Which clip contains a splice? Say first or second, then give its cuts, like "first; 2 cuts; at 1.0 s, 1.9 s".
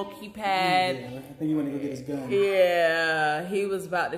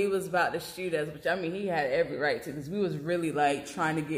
first; 1 cut; at 1.1 s